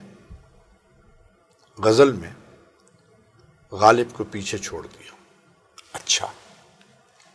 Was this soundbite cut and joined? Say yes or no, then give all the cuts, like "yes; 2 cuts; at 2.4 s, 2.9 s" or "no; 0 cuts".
no; 0 cuts